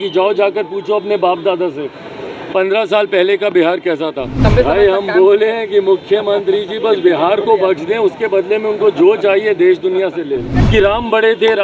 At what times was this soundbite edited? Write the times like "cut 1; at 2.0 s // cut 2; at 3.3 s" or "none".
cut 1; at 4.5 s // cut 2; at 10.5 s